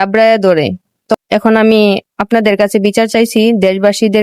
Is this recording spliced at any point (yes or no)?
yes